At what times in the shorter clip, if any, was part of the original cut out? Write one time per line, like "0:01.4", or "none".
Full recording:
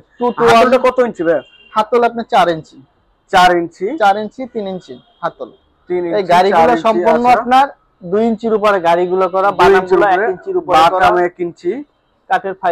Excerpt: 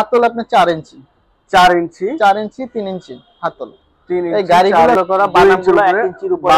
0:05.0